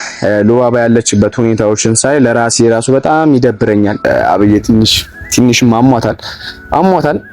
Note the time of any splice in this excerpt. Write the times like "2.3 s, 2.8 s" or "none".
4.0 s